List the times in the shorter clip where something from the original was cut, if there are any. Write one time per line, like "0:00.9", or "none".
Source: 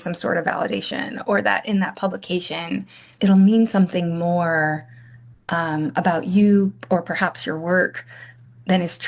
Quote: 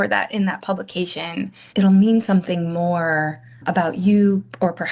0:01.6
0:03.6